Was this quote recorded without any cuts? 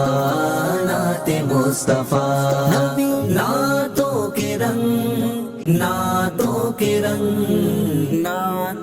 no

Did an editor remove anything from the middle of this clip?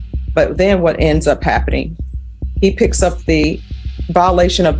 yes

